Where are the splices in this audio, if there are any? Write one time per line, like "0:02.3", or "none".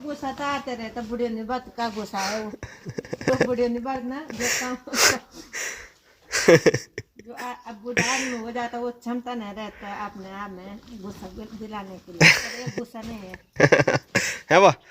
none